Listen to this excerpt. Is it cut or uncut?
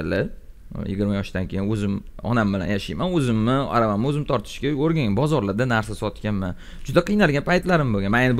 uncut